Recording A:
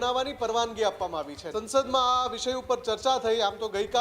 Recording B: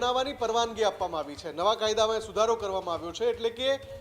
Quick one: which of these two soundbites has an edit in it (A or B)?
A